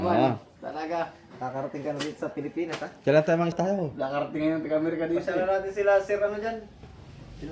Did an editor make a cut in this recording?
yes; 1 cut; at 3.5 s

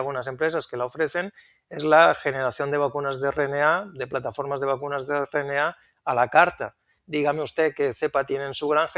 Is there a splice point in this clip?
no; 0 cuts

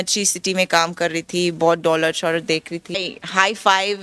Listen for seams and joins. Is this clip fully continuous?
no; 1 cut; at 3.0 s

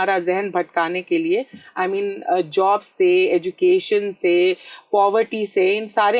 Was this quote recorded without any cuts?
yes; 0 cuts

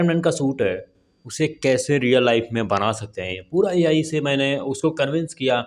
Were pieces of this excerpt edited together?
no; 0 cuts

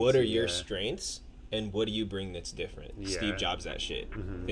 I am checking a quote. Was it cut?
no; 0 cuts

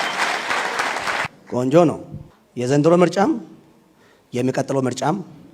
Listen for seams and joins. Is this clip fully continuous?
no; 1 cut; at 1.3 s

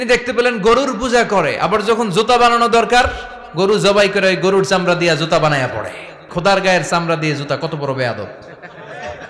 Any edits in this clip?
yes; 1 cut; at 6.3 s

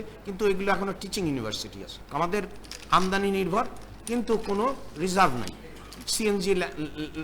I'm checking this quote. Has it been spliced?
yes; 1 cut; at 1.9 s

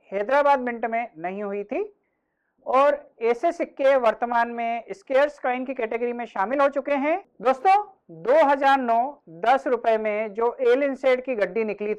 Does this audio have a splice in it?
yes; 1 cut; at 7.3 s

